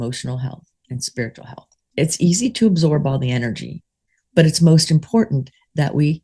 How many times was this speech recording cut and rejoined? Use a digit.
1